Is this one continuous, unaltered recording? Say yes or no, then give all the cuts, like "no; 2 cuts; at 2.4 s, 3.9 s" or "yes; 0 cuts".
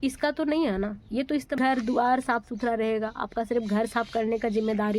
no; 1 cut; at 1.6 s